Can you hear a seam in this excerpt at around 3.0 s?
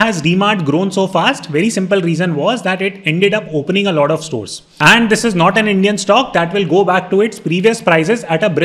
no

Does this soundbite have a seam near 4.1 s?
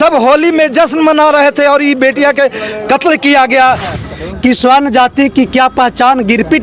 yes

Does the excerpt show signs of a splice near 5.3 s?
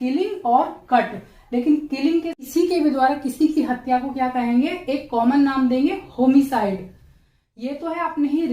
no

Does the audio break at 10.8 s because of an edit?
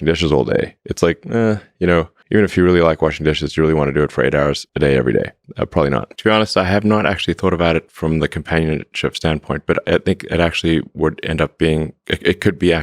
no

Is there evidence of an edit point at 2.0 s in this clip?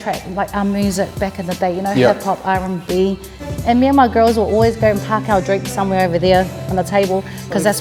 no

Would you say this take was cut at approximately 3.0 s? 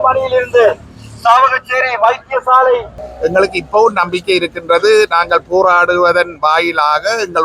yes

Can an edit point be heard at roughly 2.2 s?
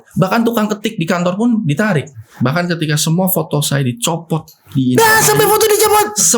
yes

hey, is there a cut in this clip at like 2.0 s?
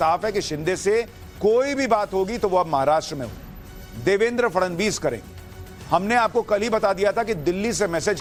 no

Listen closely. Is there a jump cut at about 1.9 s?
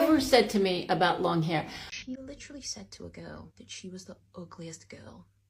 yes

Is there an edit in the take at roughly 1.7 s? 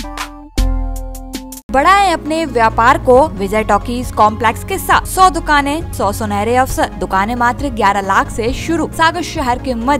yes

